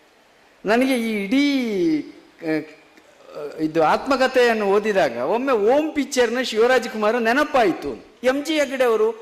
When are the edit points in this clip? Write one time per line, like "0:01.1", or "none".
0:08.0